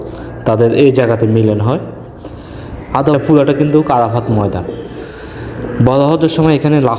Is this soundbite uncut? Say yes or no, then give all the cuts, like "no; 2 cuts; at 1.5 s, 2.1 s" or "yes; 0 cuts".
no; 1 cut; at 3.1 s